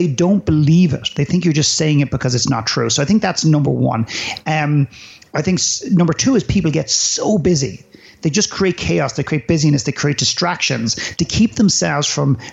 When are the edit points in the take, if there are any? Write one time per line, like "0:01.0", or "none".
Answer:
none